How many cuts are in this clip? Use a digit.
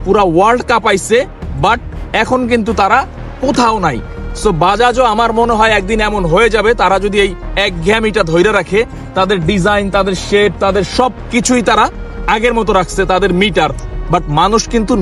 0